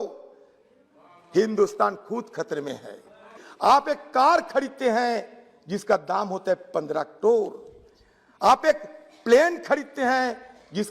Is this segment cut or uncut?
cut